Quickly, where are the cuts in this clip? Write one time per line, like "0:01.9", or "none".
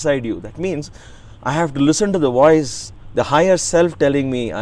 none